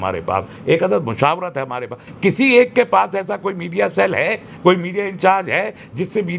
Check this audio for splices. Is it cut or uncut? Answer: uncut